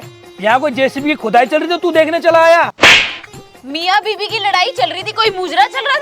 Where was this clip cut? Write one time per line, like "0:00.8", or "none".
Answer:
0:02.7